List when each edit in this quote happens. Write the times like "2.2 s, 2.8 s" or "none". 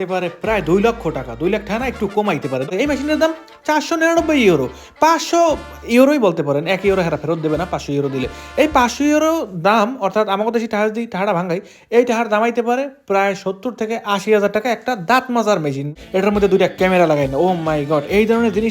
2.7 s, 15.9 s